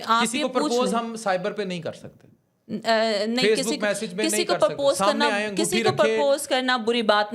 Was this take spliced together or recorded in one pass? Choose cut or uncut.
uncut